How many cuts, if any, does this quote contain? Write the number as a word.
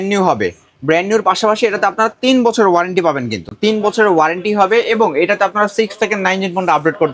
zero